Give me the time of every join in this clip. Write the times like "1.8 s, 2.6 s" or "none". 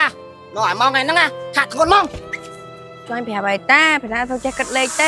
none